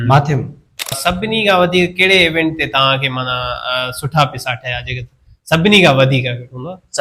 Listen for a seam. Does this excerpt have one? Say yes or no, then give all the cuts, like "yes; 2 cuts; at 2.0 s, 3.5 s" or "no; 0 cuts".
yes; 1 cut; at 1.0 s